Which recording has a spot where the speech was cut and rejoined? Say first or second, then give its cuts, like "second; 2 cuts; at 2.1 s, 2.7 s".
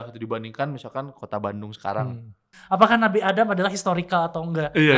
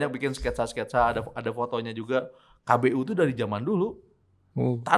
first; 1 cut; at 2.5 s